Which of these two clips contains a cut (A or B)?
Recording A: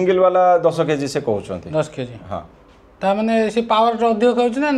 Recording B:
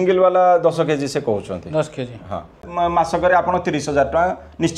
B